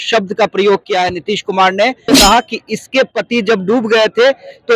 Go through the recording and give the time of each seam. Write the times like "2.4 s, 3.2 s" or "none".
2.1 s